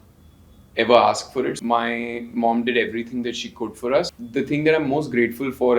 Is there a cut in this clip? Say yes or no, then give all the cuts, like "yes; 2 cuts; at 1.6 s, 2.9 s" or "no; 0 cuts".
yes; 1 cut; at 1.6 s